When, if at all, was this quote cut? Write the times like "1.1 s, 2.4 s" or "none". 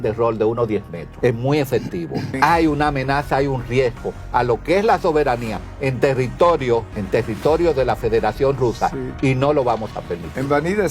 1.0 s, 2.3 s, 7.0 s

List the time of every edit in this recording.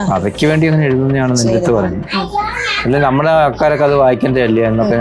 none

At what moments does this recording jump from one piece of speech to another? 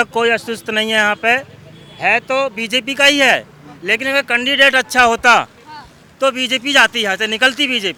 none

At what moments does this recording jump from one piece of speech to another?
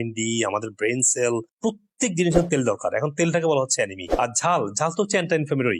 4.1 s

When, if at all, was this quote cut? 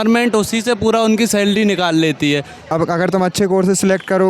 2.6 s

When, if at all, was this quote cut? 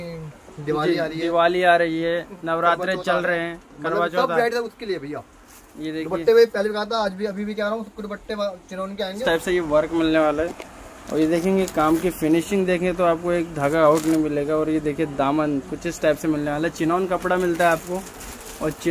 9.2 s

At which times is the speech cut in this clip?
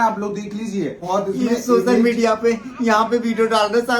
1.0 s

